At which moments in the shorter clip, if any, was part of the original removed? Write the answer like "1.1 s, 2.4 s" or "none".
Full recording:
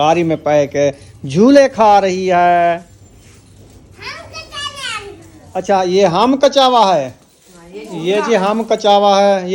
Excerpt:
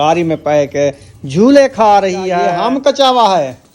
2.5 s